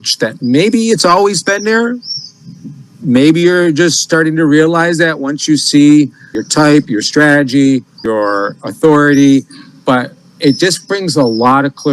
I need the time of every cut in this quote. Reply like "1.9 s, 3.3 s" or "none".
6.4 s, 8.0 s